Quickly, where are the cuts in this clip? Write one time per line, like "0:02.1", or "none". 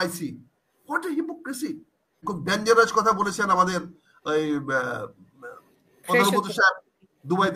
0:02.3